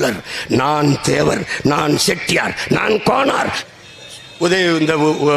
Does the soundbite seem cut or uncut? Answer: cut